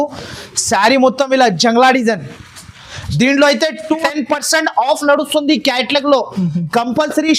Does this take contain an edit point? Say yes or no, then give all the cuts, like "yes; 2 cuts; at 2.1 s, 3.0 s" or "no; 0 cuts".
yes; 1 cut; at 4.0 s